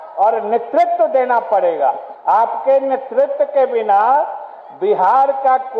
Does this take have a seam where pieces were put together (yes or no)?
yes